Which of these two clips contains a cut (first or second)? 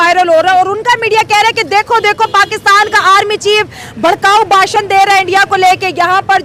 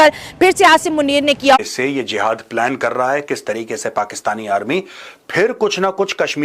second